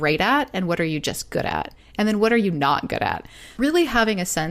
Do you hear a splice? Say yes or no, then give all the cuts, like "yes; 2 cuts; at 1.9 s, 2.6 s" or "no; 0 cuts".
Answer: yes; 1 cut; at 3.4 s